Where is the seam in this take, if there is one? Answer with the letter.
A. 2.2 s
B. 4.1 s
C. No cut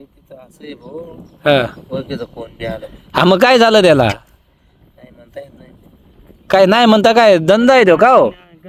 C